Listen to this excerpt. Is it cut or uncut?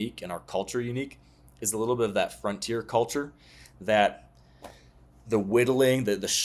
uncut